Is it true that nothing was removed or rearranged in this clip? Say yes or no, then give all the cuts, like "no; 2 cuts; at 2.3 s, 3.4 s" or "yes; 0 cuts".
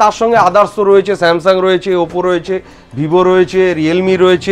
yes; 0 cuts